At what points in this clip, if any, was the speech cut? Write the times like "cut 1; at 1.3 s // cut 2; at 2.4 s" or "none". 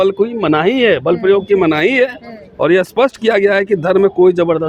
none